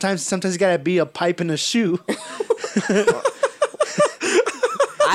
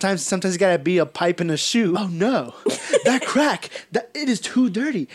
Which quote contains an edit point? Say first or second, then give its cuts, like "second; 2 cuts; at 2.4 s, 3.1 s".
second; 1 cut; at 2.0 s